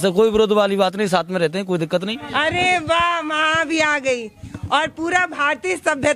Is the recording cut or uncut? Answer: cut